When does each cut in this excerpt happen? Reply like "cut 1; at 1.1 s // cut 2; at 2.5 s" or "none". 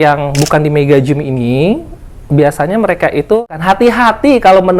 cut 1; at 3.5 s